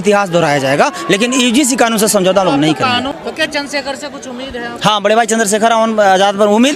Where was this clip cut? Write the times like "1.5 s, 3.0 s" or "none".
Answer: 3.1 s

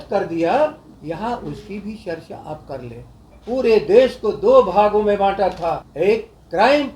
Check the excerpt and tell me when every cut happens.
0.9 s, 3.3 s, 5.9 s

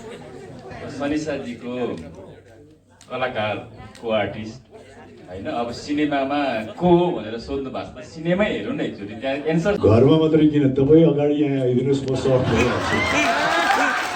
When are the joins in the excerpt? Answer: 9.8 s

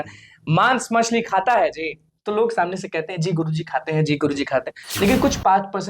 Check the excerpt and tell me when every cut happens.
4.8 s

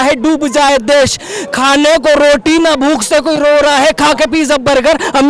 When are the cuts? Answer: none

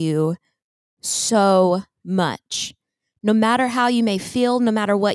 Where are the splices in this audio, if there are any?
none

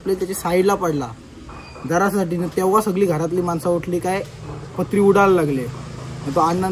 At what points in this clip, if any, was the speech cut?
none

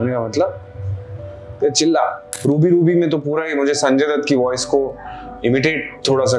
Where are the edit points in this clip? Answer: 2.3 s

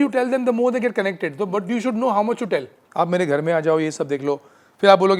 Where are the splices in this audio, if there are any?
2.8 s

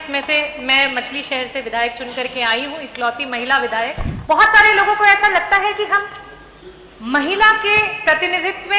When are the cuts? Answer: 4.1 s

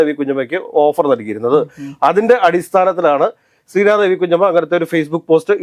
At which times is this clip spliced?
none

